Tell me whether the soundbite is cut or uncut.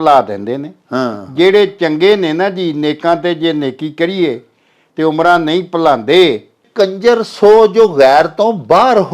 cut